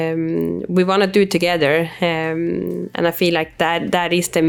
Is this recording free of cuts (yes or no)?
yes